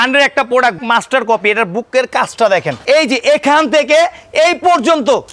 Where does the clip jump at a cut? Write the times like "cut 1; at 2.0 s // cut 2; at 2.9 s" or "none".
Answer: cut 1; at 0.8 s // cut 2; at 2.7 s